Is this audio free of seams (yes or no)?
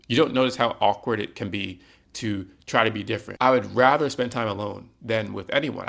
no